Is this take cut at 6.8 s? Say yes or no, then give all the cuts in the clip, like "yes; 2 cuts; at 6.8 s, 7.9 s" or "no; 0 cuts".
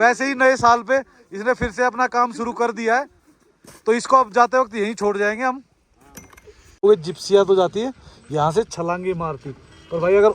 yes; 1 cut; at 6.8 s